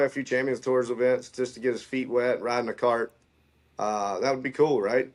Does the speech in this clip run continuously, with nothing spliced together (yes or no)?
yes